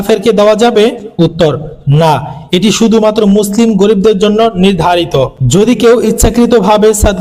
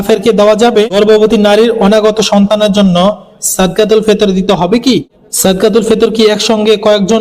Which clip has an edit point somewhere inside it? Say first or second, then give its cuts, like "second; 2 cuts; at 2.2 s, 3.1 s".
second; 2 cuts; at 1.0 s, 5.2 s